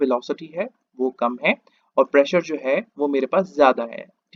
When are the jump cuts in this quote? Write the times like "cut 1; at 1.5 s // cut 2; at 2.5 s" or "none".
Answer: none